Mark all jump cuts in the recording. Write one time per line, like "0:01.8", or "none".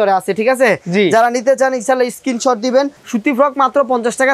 0:03.0